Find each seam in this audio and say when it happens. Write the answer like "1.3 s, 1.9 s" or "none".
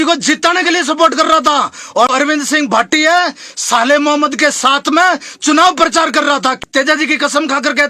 2.2 s, 6.3 s

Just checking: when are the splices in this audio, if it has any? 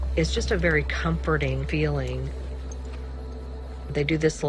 3.3 s

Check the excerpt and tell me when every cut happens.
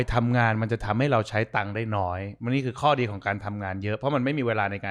none

